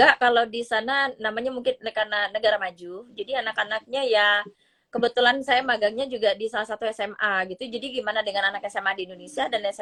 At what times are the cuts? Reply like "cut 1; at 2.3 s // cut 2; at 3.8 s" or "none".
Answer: none